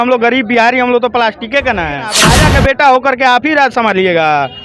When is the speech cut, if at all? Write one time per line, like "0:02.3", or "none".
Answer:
0:02.3